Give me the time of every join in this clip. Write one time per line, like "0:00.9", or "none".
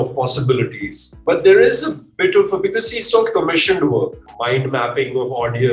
0:01.1
0:04.2